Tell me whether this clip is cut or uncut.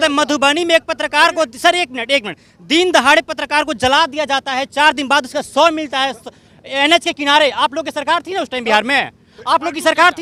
uncut